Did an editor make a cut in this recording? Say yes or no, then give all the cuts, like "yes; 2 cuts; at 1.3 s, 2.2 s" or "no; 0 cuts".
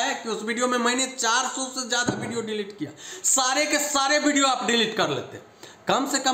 no; 0 cuts